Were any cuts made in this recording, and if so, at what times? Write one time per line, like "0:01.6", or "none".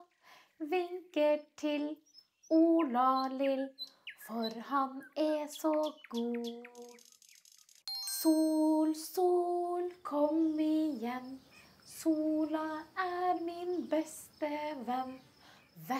0:08.0